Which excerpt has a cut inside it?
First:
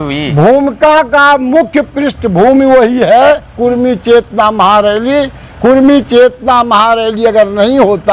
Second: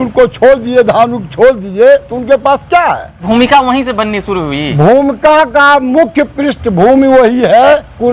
second; 1 cut; at 3.2 s

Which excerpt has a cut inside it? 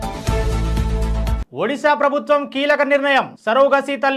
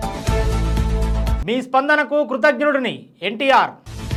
first; 1 cut; at 1.4 s

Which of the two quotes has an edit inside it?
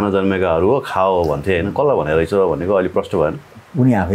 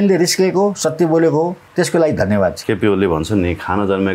second; 2 cuts; at 1.7 s, 2.6 s

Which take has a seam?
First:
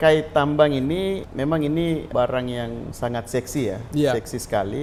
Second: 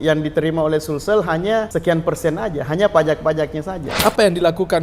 second; 2 cuts; at 1.7 s, 3.8 s

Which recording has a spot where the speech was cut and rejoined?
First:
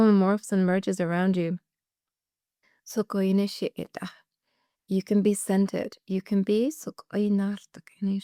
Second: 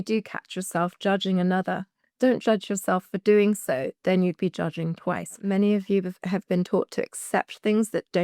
second; 1 cut; at 5.4 s

